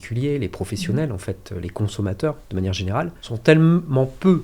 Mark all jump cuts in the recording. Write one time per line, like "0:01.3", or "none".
0:03.2